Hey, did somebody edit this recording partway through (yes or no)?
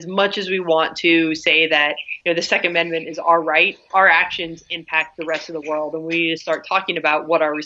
yes